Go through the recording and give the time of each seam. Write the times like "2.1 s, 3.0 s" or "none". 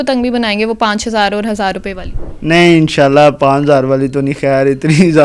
none